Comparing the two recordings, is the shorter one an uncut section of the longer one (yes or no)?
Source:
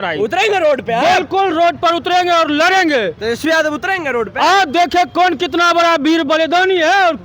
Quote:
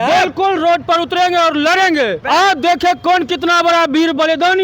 no